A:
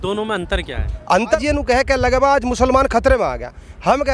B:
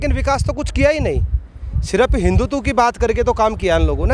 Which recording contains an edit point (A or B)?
A